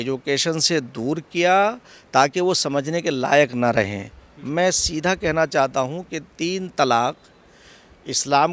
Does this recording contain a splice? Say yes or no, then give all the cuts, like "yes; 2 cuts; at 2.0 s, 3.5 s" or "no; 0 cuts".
no; 0 cuts